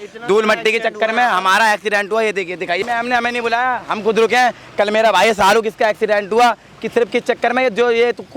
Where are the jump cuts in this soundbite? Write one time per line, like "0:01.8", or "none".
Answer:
0:02.8